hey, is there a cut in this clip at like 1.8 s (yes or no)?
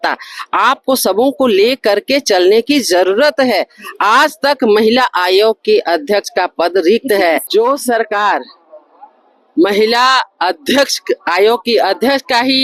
no